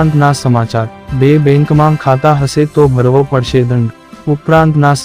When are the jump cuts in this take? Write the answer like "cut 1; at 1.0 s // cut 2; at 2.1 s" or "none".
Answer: cut 1; at 1.0 s // cut 2; at 4.1 s